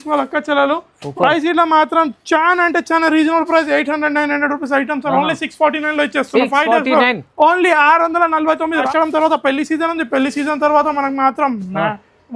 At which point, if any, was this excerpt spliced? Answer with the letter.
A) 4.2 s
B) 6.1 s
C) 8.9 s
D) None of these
C